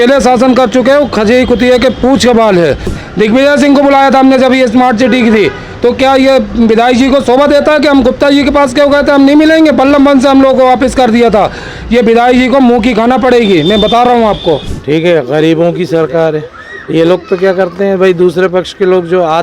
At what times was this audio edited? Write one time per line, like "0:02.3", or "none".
0:02.9
0:14.7